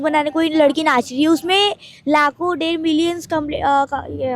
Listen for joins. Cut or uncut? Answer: uncut